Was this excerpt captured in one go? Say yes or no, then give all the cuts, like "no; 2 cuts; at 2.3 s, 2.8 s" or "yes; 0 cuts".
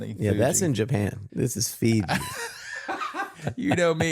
no; 2 cuts; at 1.2 s, 3.2 s